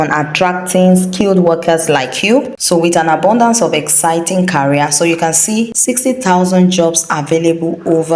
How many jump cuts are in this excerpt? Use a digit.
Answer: 2